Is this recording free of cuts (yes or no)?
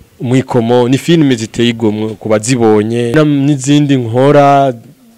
no